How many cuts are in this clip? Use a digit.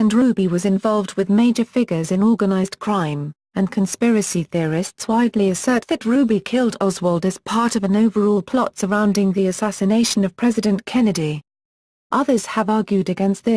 1